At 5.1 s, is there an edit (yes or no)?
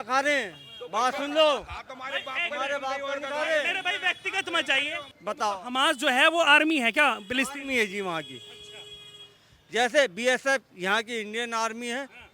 yes